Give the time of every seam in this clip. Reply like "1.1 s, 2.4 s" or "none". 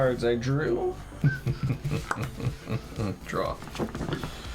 1.1 s